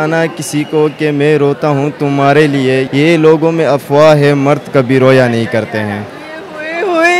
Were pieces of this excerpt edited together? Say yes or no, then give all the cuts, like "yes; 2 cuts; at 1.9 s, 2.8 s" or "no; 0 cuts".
yes; 1 cut; at 2.9 s